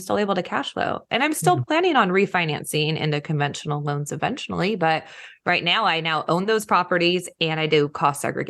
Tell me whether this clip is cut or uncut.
uncut